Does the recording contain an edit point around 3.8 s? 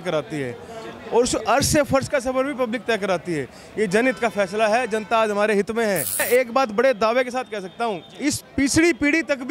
no; 1 cut; at 6.2 s

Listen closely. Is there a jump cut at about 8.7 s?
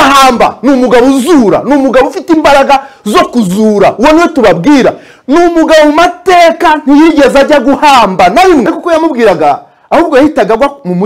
yes; 1 cut; at 8.7 s

